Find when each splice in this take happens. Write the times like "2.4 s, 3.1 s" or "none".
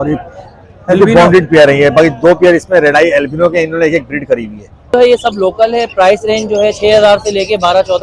4.9 s